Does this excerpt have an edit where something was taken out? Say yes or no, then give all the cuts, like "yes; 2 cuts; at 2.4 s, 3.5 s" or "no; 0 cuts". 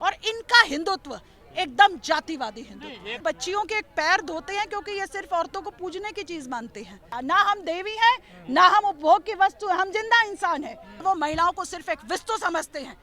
yes; 3 cuts; at 3.2 s, 7.1 s, 10.9 s